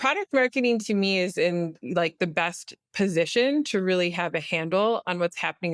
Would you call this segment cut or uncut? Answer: uncut